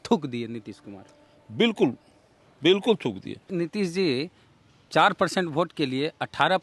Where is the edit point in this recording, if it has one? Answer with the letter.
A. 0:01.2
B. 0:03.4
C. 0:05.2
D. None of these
B